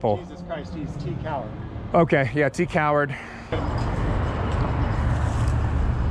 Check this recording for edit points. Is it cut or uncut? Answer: cut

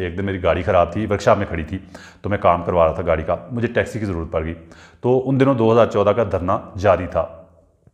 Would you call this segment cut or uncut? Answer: uncut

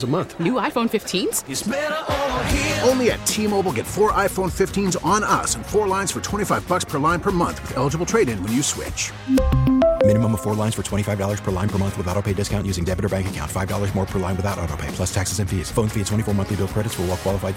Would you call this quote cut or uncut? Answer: uncut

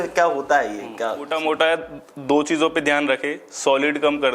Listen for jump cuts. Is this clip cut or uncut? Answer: cut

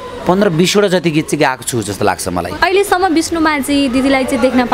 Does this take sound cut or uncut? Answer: cut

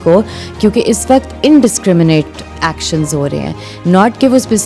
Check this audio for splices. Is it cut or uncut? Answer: uncut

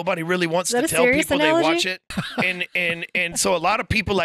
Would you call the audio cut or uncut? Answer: cut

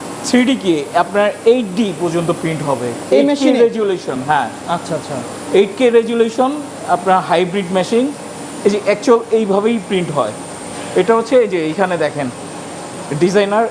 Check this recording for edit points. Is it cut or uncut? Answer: uncut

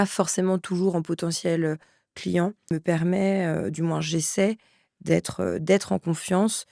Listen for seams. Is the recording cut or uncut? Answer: cut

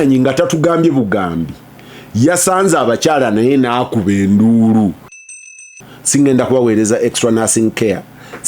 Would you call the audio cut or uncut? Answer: cut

